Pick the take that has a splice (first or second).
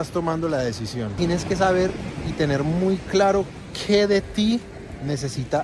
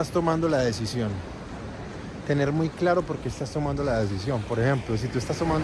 first